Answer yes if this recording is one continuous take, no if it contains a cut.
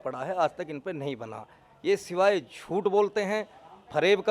yes